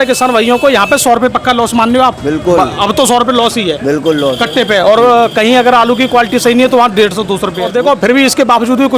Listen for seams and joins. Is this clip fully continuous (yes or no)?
no